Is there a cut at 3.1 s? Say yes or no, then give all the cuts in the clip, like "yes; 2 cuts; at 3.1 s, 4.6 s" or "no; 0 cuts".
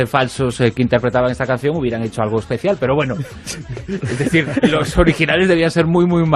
no; 1 cut; at 4.7 s